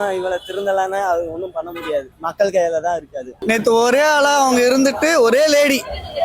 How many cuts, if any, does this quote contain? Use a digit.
1